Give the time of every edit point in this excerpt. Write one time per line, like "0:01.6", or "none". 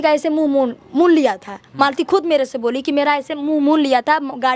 none